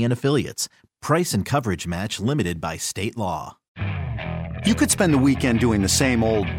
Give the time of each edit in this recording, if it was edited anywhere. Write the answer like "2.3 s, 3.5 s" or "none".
3.6 s

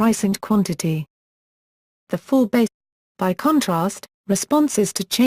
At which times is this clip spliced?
none

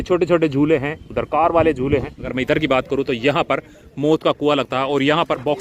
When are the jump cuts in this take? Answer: 2.3 s

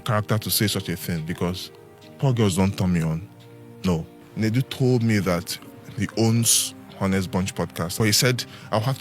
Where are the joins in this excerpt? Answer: 4.2 s, 8.0 s

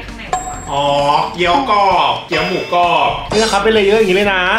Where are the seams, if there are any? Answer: 3.2 s

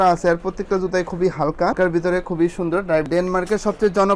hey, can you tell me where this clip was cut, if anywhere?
3.1 s

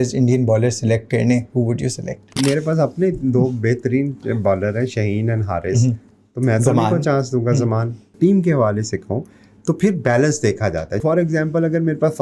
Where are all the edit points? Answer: 2.4 s, 8.1 s, 11.0 s

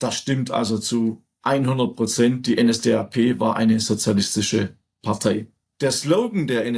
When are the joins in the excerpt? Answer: 5.6 s

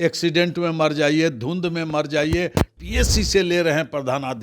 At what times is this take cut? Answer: 2.7 s

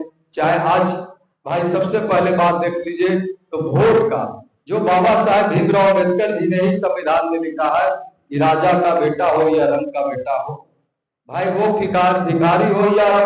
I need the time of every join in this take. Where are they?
none

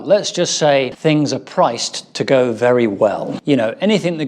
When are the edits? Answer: 0.9 s, 3.3 s

